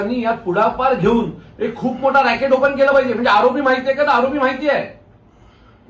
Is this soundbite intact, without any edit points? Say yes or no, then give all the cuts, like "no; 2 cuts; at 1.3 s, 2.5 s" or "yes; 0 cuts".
yes; 0 cuts